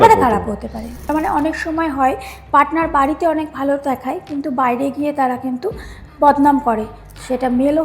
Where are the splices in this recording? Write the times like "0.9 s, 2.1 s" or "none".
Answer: 1.1 s